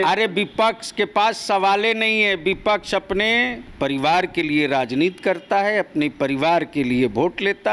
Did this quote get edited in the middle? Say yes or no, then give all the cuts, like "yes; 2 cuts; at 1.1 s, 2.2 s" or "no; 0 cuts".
yes; 1 cut; at 3.6 s